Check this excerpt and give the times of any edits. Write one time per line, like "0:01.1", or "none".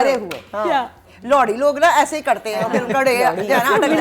0:01.0